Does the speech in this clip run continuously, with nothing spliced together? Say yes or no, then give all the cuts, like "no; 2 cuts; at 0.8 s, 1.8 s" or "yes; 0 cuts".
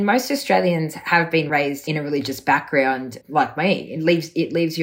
no; 2 cuts; at 1.5 s, 3.2 s